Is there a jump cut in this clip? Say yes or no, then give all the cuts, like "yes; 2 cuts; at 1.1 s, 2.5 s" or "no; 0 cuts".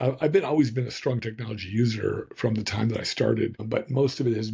yes; 1 cut; at 3.6 s